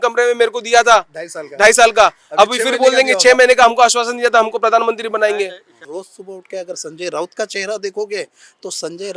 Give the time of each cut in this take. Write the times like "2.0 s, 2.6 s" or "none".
5.7 s